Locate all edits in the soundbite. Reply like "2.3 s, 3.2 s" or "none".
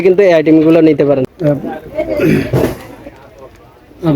1.2 s